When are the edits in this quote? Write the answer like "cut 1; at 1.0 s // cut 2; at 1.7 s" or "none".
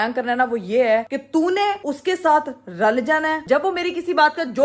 cut 1; at 3.4 s

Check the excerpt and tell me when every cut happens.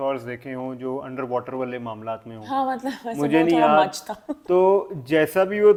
none

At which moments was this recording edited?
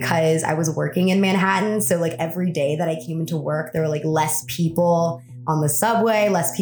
none

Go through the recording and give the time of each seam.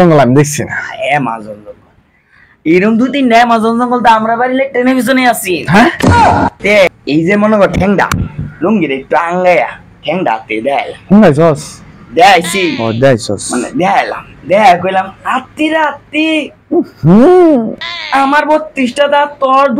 cut 1; at 7.0 s

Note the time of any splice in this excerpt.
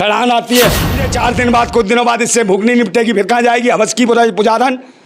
cut 1; at 1.1 s

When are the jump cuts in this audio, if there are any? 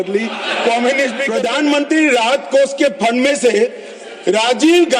cut 1; at 1.2 s

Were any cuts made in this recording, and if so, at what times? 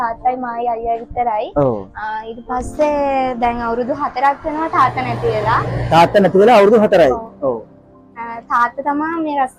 none

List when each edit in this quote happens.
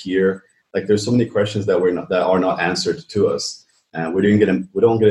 none

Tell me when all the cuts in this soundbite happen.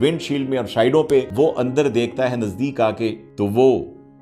cut 1; at 1.3 s // cut 2; at 3.2 s

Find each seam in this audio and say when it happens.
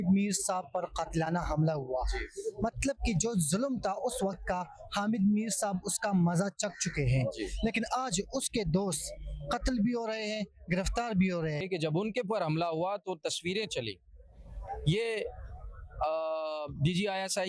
cut 1; at 11.6 s

